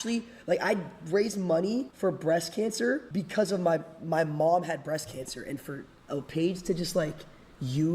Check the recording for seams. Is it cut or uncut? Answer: cut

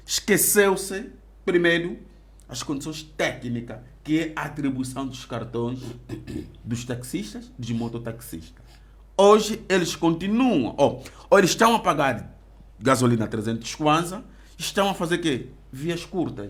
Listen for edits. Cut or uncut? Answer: uncut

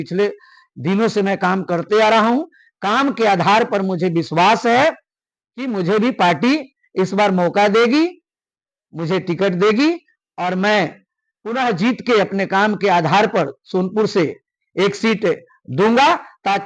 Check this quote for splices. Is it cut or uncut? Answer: uncut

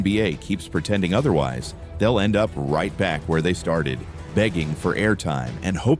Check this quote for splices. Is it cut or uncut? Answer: uncut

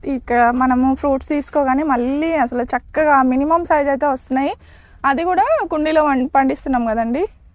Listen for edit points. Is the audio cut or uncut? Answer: uncut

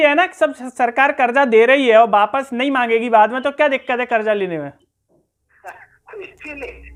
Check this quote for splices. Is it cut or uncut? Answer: uncut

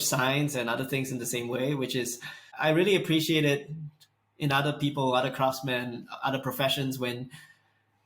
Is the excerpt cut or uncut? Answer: cut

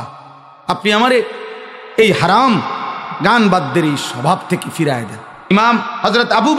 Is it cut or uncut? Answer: cut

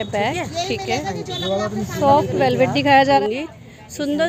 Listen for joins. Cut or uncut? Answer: cut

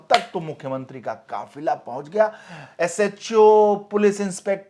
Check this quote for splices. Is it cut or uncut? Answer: uncut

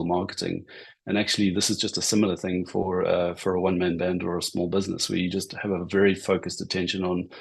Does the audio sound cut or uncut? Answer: uncut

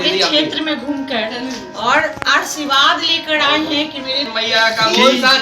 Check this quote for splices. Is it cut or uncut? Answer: cut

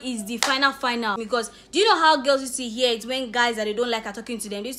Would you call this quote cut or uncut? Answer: cut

